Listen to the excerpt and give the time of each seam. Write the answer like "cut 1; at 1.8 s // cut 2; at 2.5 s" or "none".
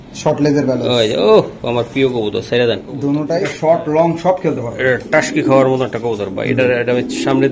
cut 1; at 3.4 s